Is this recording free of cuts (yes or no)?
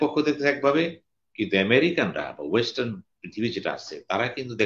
yes